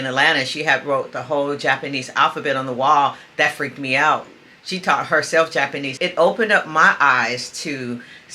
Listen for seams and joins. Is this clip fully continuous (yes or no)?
no